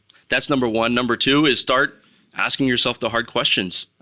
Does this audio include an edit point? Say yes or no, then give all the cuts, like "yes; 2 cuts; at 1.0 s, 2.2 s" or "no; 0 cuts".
no; 0 cuts